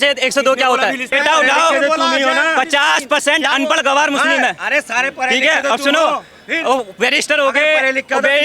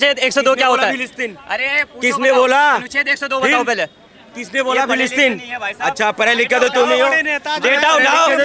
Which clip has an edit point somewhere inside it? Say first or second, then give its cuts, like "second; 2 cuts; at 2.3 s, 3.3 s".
first; 1 cut; at 1.1 s